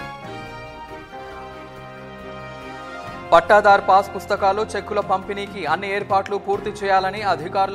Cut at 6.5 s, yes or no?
no